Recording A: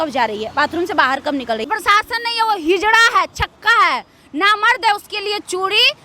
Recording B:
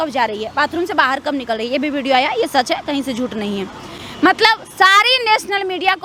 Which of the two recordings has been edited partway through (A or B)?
A